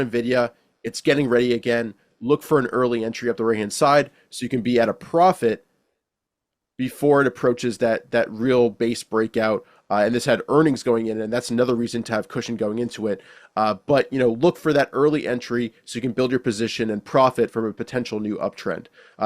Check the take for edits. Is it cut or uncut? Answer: uncut